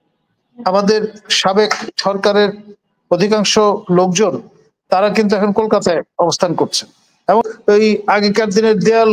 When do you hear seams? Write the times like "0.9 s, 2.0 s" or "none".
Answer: 7.4 s